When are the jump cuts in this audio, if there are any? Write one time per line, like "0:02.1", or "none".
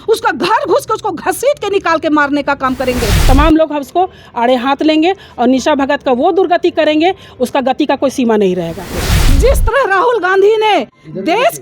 0:03.2
0:09.2